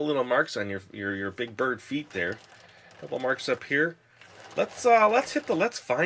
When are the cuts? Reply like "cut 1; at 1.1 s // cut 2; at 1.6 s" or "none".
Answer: cut 1; at 3.4 s